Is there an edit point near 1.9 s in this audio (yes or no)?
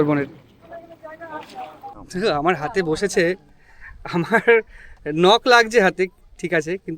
yes